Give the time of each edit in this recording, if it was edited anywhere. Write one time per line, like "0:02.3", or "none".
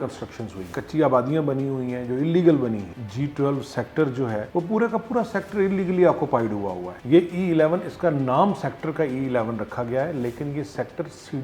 0:02.9
0:06.9